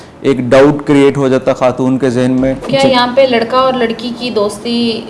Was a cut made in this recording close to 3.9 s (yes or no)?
no